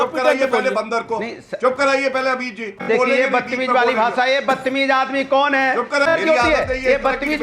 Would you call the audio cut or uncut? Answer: cut